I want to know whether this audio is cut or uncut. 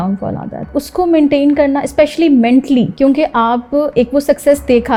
uncut